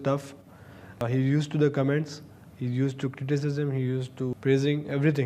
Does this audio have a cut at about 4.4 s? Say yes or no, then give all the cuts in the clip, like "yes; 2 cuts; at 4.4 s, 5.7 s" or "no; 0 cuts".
yes; 2 cuts; at 1.0 s, 4.4 s